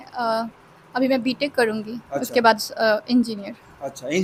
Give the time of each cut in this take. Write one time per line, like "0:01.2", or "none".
none